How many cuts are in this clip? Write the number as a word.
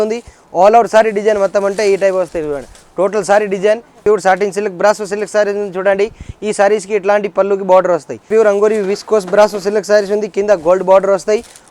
two